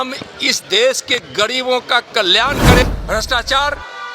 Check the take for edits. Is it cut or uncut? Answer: cut